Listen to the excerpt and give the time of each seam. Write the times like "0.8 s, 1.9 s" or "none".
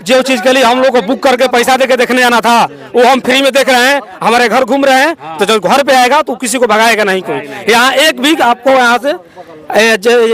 none